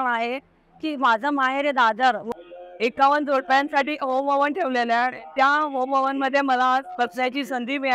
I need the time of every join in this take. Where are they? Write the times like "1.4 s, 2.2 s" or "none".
2.3 s